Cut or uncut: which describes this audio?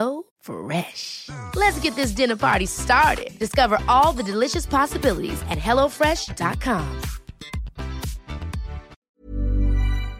cut